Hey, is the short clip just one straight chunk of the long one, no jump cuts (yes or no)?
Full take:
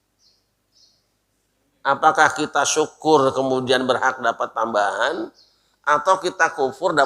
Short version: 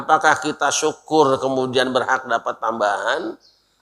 yes